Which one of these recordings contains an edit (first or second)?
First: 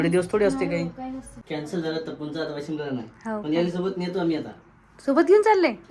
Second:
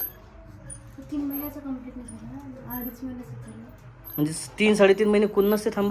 first